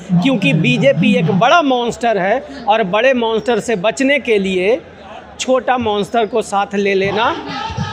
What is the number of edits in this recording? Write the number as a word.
zero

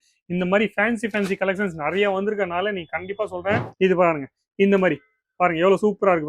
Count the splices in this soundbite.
one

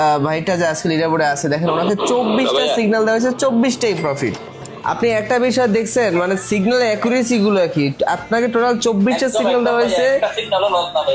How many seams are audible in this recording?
one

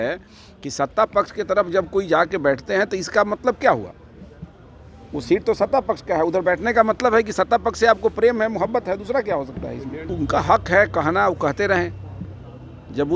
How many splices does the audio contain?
one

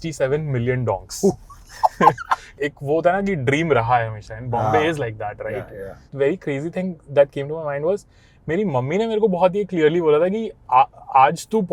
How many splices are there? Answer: two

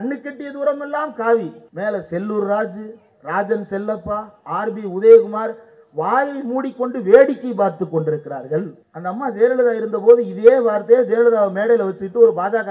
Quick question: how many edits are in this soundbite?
two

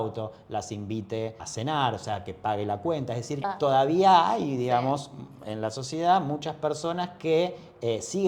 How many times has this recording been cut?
two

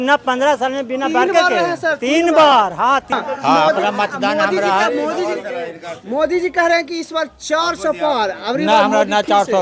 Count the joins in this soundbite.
one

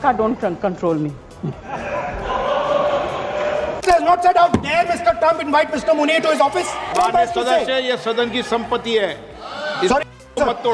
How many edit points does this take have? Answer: two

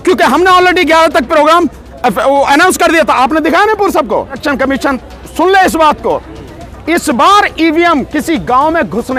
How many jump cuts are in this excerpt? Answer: one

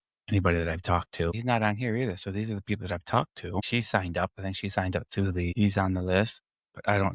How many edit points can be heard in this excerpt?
three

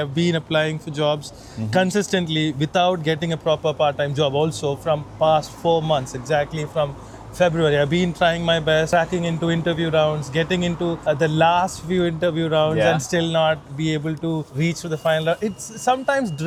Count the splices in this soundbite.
zero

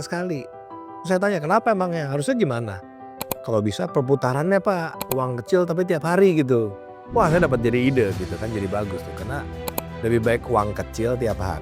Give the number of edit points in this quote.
zero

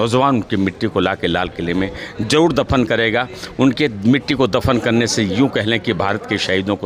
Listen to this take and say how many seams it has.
zero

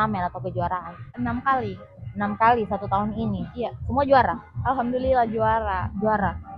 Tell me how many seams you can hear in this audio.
one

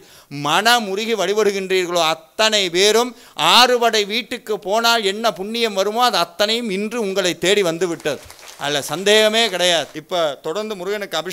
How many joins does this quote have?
one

